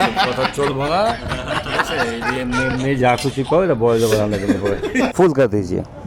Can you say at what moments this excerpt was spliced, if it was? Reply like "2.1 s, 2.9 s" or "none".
5.1 s